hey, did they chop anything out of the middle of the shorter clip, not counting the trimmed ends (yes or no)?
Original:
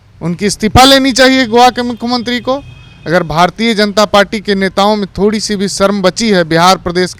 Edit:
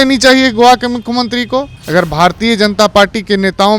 yes